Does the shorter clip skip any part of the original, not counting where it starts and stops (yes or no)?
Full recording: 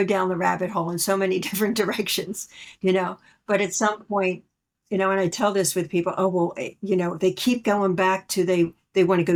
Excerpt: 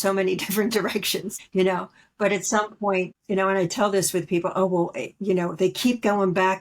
yes